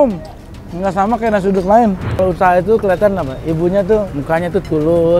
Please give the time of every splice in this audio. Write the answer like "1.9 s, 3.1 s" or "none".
2.1 s, 4.1 s